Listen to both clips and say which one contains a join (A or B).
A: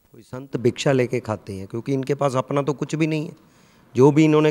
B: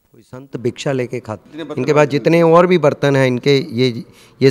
B